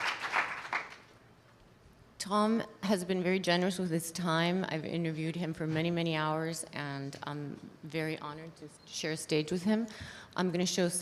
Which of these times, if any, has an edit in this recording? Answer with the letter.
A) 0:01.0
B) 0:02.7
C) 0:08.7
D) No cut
C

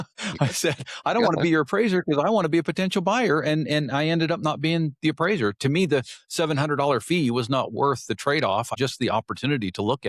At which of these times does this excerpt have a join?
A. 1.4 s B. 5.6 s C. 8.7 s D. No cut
C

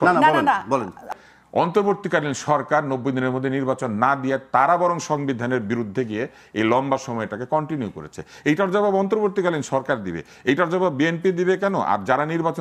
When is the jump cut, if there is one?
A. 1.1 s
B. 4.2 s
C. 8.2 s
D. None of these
A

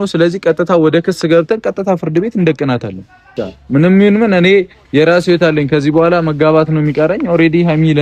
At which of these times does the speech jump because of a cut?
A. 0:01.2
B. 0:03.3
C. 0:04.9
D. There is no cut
B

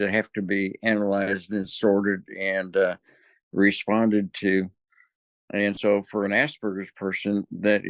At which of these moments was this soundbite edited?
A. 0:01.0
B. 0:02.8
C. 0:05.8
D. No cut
C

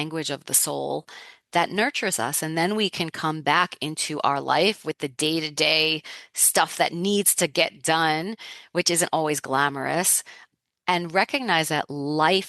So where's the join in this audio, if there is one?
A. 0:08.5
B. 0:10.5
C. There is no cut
B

